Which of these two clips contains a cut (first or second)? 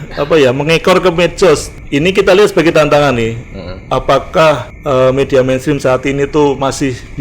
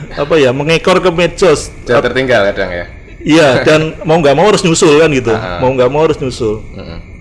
first